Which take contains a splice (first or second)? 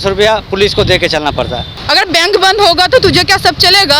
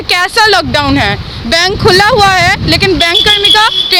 first